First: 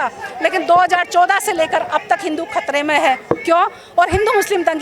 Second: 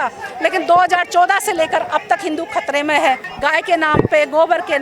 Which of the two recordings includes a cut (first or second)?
second